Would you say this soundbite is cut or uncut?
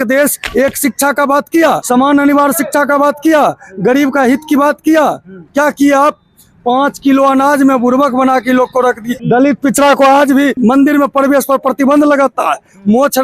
cut